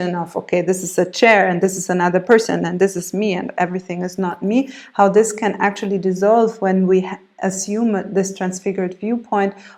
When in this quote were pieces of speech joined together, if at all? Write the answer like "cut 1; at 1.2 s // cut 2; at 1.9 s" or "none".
none